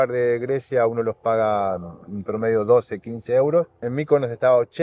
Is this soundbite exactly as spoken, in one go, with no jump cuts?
no; 1 cut; at 3.9 s

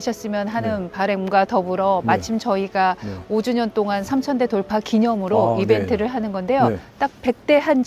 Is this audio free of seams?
yes; 0 cuts

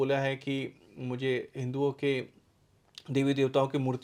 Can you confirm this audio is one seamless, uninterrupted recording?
yes; 0 cuts

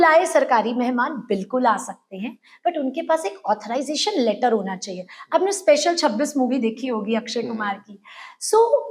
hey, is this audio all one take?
yes; 0 cuts

